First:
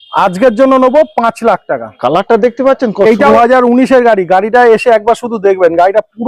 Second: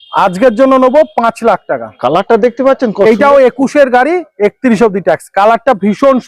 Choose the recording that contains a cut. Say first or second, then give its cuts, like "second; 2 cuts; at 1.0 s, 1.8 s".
first; 1 cut; at 3.3 s